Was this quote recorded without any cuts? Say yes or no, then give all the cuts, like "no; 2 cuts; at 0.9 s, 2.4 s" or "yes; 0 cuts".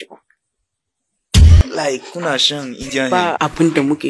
no; 1 cut; at 1.3 s